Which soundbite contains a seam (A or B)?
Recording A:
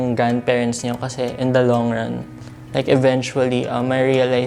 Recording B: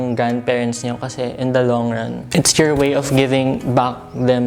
B